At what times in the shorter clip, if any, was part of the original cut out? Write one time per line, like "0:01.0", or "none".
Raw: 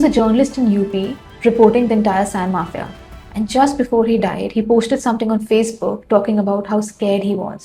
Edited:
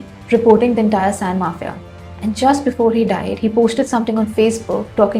none

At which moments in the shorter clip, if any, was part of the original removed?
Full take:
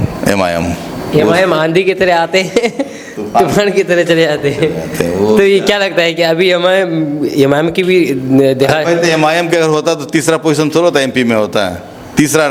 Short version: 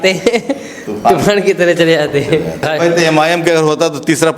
0:02.7

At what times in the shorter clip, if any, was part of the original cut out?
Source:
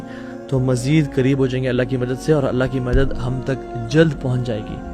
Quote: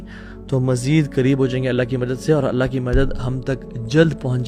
none

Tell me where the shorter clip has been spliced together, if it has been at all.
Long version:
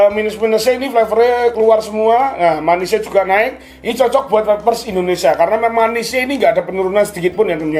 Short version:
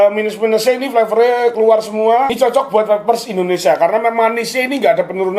0:02.3

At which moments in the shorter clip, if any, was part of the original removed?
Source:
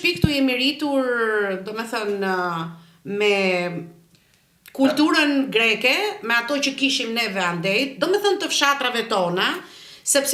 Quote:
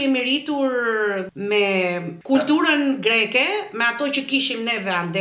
0:01.3
0:02.1

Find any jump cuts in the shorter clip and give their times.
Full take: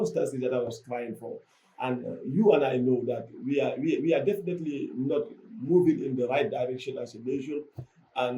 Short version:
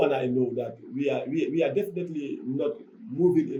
none

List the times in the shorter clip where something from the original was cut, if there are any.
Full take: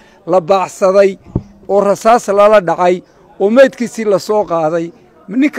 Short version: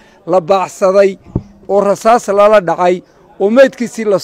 none

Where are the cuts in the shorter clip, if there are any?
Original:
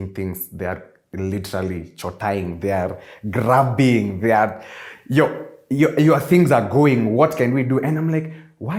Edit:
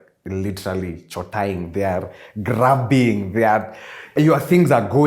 0:04.1

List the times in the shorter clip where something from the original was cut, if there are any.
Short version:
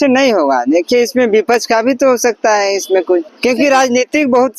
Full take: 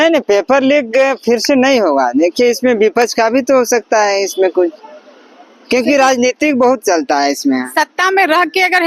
0:03.3

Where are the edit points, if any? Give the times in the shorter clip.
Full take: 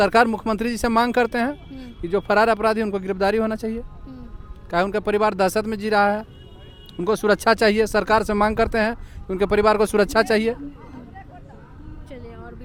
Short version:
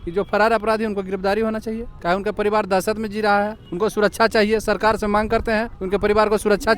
0:01.9
0:03.6
0:05.7

